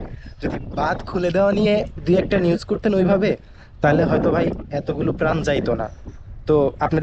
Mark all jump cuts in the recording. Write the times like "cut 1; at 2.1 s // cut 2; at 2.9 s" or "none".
none